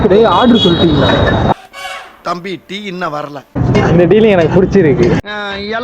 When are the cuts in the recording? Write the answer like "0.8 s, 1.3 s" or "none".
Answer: 3.6 s